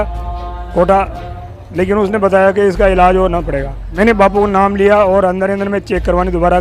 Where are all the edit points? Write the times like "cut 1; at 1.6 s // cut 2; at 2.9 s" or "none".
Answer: cut 1; at 3.8 s

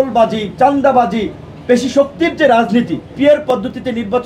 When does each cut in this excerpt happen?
cut 1; at 3.0 s

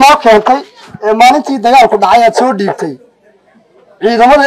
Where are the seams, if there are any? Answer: none

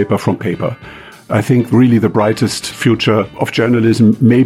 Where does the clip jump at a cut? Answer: cut 1; at 1.2 s // cut 2; at 2.8 s

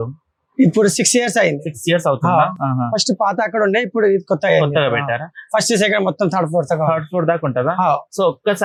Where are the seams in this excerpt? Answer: none

